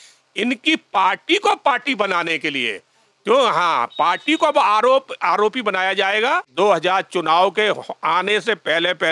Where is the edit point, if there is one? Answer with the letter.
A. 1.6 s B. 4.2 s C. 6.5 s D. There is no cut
C